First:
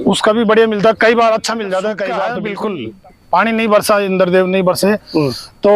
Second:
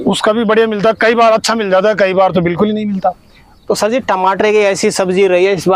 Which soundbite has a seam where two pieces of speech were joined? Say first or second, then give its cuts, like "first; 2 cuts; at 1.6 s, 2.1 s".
first; 1 cut; at 2.3 s